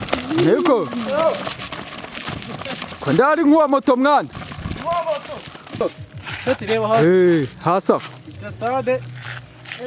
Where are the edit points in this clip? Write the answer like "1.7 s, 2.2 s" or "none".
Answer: 5.8 s